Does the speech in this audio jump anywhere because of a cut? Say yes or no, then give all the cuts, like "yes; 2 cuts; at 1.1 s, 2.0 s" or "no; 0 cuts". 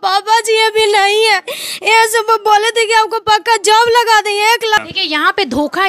yes; 1 cut; at 4.8 s